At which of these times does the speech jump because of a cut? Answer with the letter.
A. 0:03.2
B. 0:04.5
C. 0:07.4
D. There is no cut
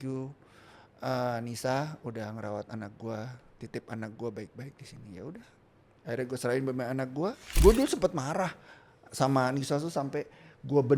C